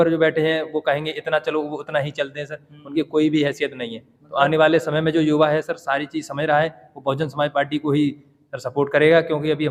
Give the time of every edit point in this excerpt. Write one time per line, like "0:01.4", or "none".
none